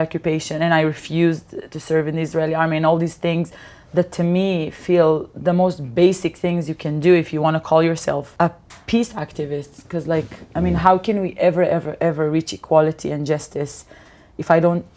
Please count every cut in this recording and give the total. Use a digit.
1